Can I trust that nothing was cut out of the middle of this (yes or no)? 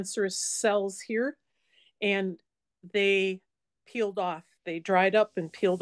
yes